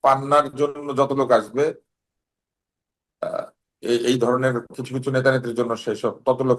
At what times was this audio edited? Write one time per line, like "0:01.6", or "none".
none